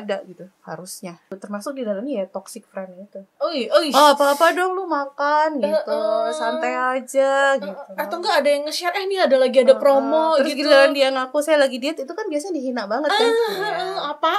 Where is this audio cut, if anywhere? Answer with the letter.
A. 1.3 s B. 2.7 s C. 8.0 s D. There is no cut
A